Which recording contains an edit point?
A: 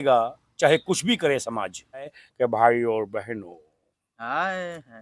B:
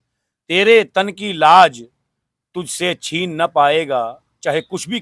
A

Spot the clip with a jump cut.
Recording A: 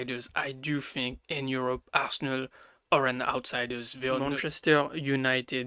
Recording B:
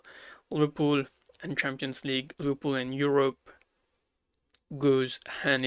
A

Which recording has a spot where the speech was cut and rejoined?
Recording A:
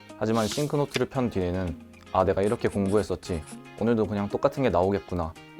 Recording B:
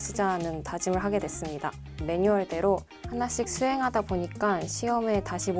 B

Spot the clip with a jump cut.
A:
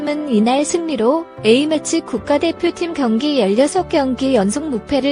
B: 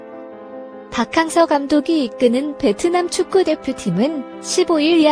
B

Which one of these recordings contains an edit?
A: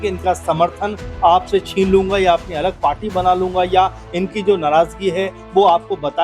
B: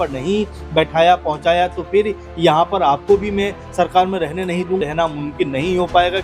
B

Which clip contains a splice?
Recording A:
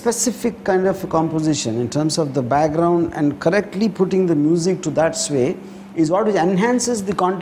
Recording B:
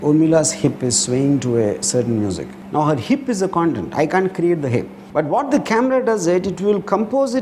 B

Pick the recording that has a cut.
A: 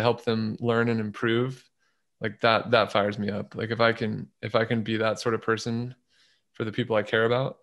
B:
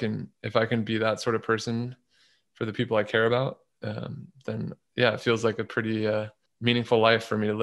B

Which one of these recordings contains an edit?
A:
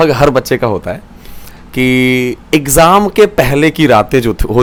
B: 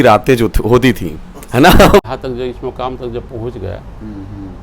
B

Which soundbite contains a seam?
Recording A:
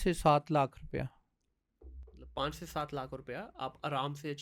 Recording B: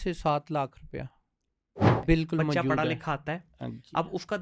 B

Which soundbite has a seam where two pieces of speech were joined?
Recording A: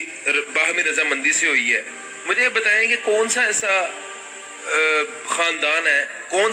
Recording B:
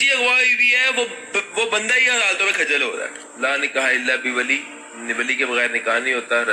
B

